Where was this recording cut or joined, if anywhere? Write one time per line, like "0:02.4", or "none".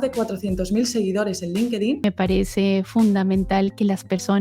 0:02.0